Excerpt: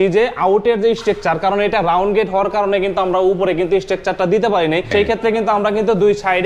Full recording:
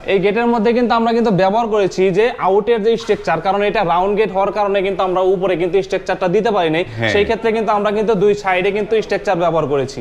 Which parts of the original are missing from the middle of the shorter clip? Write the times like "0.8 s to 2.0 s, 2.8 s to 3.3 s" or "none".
6.9 s to 7.1 s